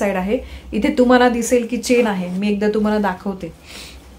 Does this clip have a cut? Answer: no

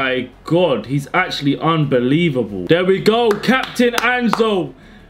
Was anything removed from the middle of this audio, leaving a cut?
yes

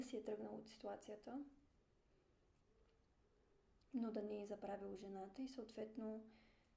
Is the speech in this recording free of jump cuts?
yes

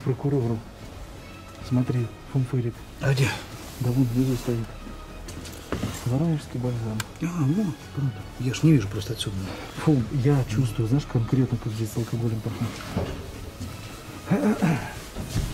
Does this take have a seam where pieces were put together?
no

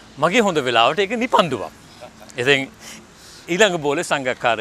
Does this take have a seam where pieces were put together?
no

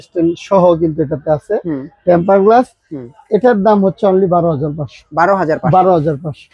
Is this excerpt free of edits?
yes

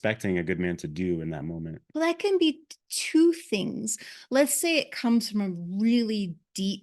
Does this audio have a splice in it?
yes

